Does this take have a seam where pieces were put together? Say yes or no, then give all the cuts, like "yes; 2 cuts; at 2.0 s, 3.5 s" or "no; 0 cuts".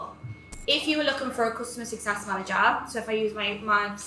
no; 0 cuts